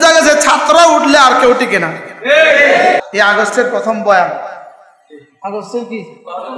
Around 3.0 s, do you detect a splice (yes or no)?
yes